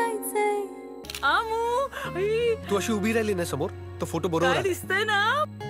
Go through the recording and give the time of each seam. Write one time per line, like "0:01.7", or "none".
0:01.0